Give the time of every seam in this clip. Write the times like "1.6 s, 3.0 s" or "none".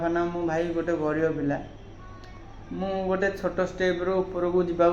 none

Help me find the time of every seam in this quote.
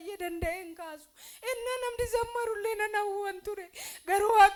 none

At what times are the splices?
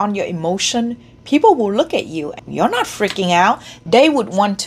2.4 s, 3.8 s

